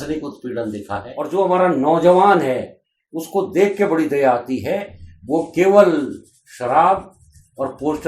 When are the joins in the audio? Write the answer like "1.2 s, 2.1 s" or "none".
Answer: 1.2 s